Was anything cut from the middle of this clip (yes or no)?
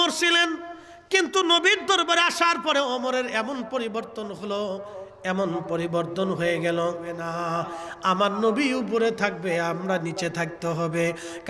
yes